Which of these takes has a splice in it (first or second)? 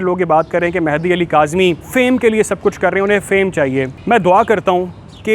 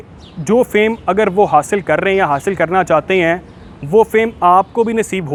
first